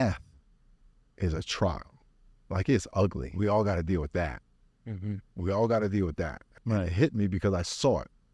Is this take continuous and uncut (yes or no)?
no